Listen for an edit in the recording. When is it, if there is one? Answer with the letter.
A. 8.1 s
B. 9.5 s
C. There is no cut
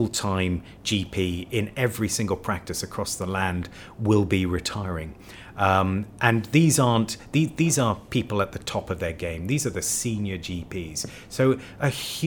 C